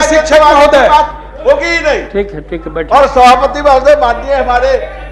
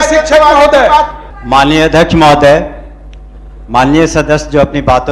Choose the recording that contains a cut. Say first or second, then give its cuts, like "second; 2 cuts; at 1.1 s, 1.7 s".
second; 1 cut; at 1.2 s